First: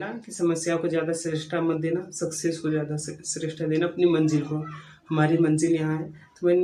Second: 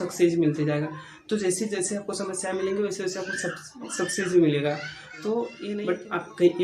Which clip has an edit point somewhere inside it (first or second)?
second